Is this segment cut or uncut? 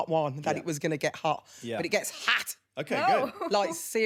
uncut